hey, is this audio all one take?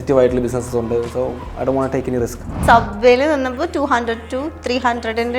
no; 1 cut; at 2.5 s

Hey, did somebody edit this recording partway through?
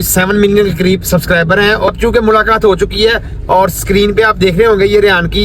yes; 1 cut; at 1.9 s

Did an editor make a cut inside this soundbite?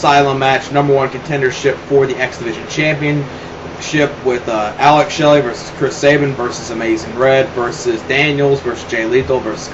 yes; 1 cut; at 4.9 s

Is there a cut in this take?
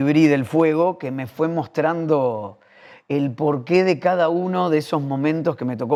no; 0 cuts

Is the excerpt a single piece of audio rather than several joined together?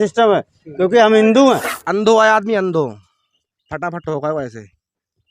no; 1 cut; at 1.8 s

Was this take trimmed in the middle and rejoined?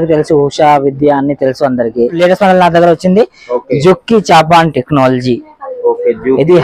yes; 1 cut; at 2.2 s

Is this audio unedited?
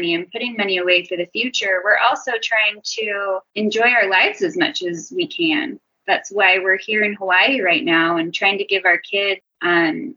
yes; 0 cuts

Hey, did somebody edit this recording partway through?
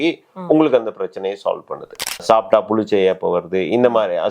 yes; 1 cut; at 2.2 s

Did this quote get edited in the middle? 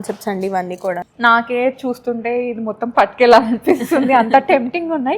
yes; 1 cut; at 1.1 s

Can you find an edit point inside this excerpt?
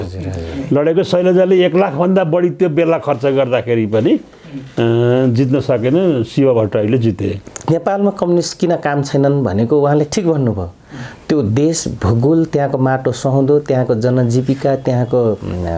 yes; 1 cut; at 7.5 s

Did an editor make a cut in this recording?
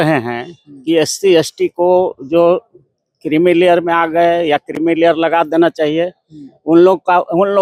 no; 0 cuts

